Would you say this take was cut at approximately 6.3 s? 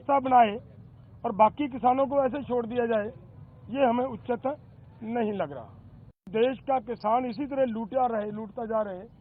yes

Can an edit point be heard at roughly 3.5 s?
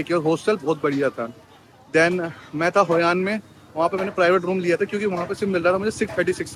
no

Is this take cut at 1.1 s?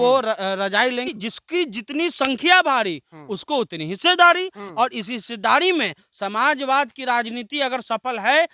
yes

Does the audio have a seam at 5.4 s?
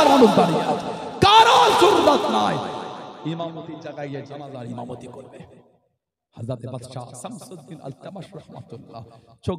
no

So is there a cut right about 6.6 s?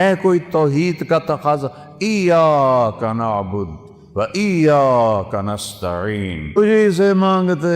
yes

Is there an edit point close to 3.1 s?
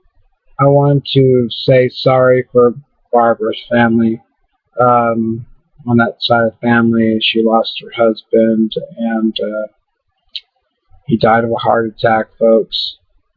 no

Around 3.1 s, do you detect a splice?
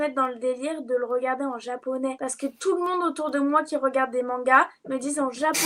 no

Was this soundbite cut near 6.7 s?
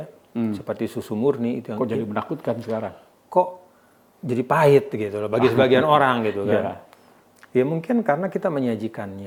no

